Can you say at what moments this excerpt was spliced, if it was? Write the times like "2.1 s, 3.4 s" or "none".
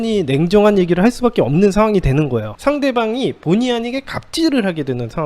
2.4 s